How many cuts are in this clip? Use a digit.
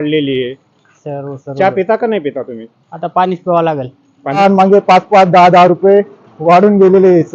1